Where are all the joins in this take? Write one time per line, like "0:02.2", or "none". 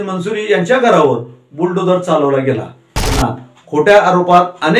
0:03.2